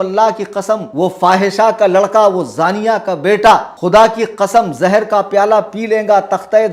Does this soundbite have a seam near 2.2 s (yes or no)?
no